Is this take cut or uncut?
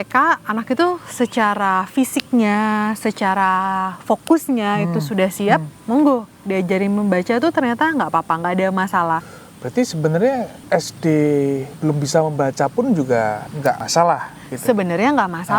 cut